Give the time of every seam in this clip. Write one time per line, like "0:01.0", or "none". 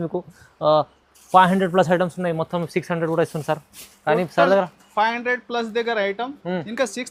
none